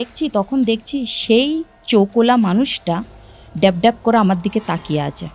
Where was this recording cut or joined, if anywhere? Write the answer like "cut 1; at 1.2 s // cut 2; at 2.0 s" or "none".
none